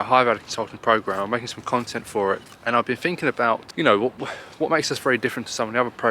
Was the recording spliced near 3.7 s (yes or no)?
yes